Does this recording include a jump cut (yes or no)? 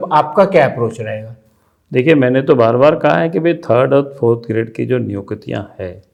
no